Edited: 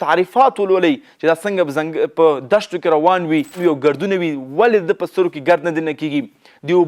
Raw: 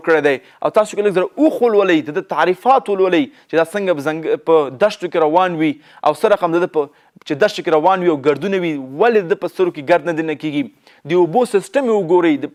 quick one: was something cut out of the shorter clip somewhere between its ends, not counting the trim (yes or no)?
yes